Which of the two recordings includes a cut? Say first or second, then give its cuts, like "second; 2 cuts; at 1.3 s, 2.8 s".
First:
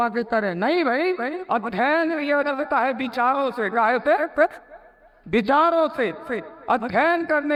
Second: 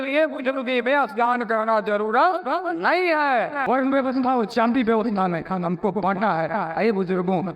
second; 1 cut; at 3.6 s